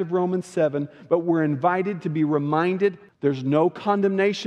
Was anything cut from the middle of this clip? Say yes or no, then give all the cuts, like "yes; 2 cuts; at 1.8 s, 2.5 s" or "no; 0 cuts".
yes; 1 cut; at 3.0 s